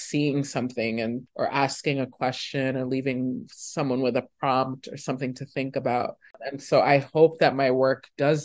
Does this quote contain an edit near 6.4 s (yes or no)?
yes